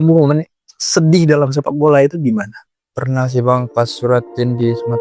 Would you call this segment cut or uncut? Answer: uncut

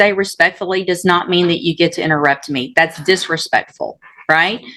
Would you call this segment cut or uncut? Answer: uncut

